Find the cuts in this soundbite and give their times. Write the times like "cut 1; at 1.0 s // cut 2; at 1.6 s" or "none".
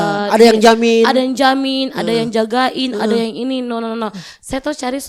none